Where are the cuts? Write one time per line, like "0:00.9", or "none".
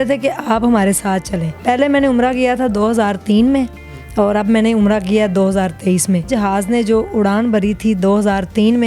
0:01.6
0:06.3